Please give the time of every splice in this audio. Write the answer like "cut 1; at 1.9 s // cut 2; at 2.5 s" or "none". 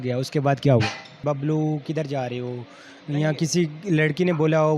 cut 1; at 1.2 s